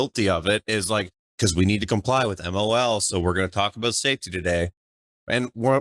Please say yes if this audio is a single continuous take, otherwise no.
no